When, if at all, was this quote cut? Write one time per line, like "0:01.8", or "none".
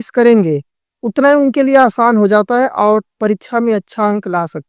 none